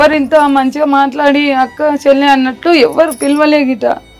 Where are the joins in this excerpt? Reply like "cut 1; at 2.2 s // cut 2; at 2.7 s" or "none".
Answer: none

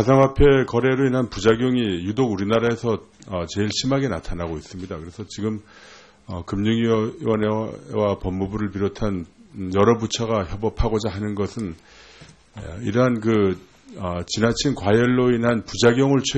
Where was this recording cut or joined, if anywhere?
cut 1; at 10.8 s

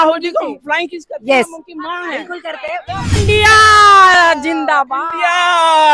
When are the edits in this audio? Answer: cut 1; at 3.1 s

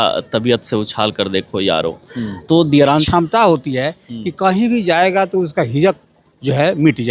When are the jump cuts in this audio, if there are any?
cut 1; at 3.0 s

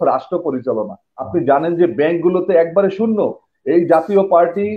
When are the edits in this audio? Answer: cut 1; at 1.1 s

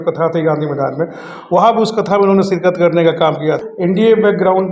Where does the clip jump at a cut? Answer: cut 1; at 3.6 s

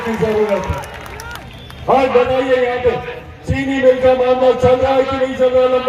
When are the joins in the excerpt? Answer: none

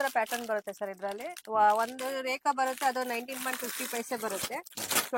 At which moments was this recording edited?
none

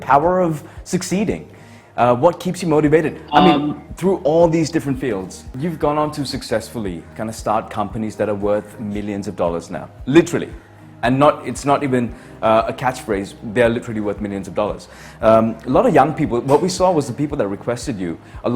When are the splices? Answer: cut 1; at 5.5 s

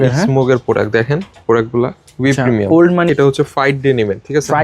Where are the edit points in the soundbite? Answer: cut 1; at 3.1 s

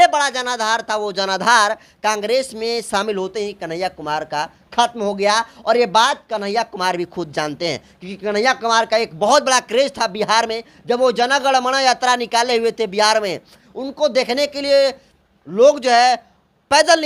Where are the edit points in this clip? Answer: none

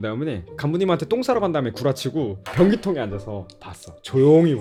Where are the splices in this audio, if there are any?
none

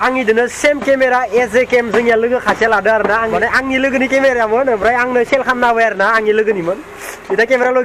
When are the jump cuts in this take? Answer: cut 1; at 3.3 s

